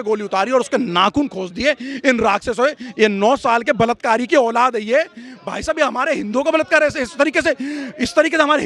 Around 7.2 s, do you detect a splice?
no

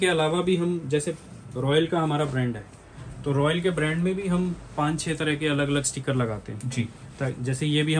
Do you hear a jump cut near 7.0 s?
no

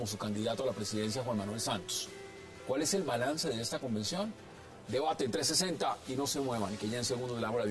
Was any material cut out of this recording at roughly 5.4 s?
yes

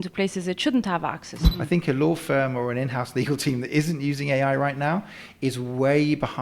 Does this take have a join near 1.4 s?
yes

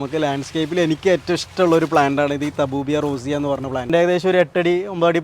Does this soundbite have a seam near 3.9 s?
yes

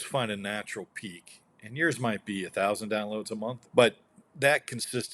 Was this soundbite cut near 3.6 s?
yes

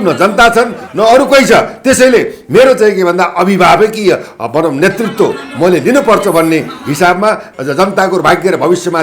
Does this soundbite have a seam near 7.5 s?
yes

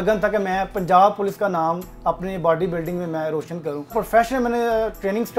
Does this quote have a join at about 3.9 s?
yes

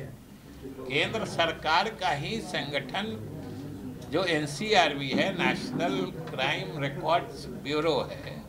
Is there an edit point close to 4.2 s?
no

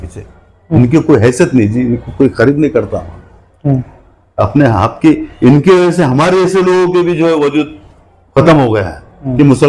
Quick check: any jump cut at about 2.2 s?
no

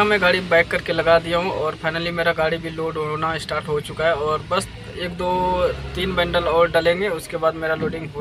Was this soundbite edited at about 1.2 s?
no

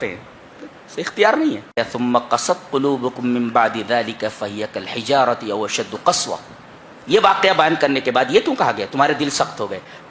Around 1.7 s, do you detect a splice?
yes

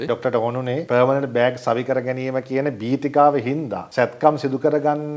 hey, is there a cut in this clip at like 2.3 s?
no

